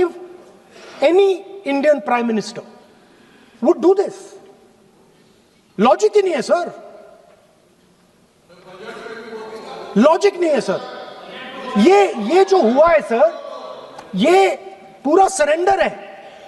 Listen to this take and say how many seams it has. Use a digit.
0